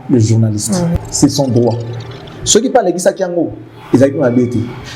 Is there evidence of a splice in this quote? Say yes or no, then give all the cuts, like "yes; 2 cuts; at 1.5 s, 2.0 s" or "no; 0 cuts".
yes; 1 cut; at 1.0 s